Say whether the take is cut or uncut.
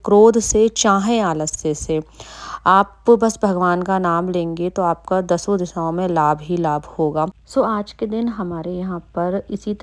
cut